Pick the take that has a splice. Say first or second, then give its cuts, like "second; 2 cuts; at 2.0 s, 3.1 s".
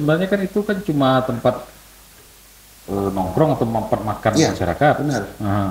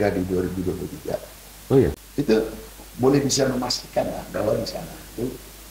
second; 1 cut; at 2.0 s